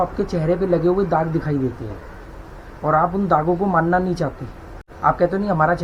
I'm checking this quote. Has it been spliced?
no; 0 cuts

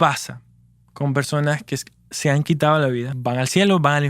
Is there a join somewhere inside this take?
yes; 1 cut; at 3.1 s

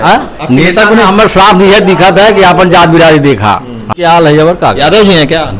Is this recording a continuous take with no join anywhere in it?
no; 1 cut; at 3.9 s

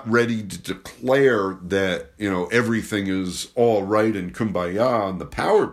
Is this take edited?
no; 0 cuts

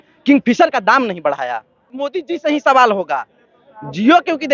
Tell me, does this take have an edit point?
yes; 1 cut; at 1.9 s

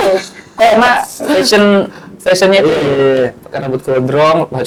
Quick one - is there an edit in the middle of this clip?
no; 0 cuts

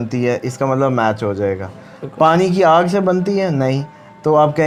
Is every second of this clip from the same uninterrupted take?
yes; 0 cuts

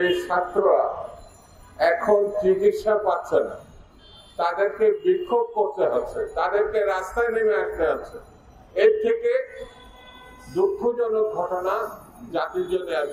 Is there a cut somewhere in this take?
no; 0 cuts

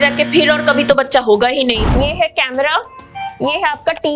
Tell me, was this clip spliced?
yes; 1 cut; at 1.9 s

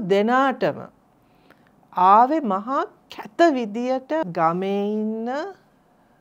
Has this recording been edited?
yes; 1 cut; at 4.3 s

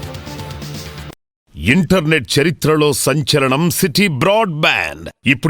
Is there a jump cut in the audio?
yes; 1 cut; at 1.5 s

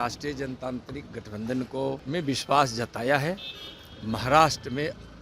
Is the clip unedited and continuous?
no; 1 cut; at 2.0 s

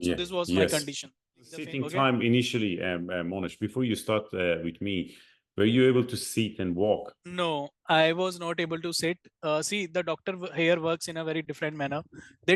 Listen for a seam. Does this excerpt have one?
yes; 1 cut; at 1.8 s

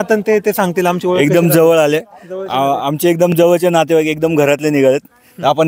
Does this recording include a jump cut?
no; 0 cuts

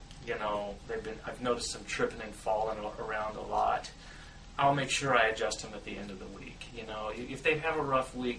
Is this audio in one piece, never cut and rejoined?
yes; 0 cuts

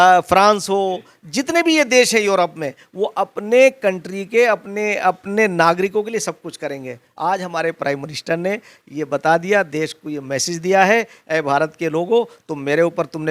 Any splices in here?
no; 0 cuts

